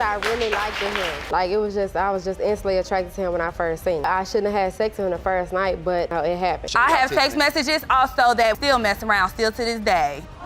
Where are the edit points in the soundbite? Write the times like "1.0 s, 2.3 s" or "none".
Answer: 6.6 s, 8.6 s